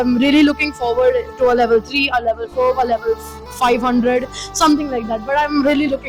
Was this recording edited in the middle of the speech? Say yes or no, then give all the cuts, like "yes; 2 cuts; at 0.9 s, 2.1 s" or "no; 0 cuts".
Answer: no; 0 cuts